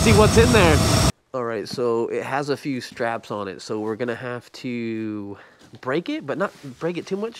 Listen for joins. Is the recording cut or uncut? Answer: cut